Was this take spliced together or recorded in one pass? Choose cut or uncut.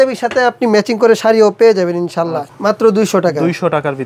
cut